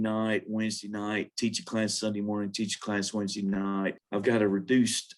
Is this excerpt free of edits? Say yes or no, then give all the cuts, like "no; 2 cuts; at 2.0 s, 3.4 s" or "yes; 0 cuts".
no; 1 cut; at 4.0 s